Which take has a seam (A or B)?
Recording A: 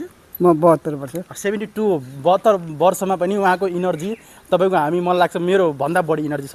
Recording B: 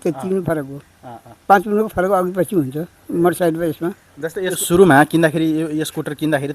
B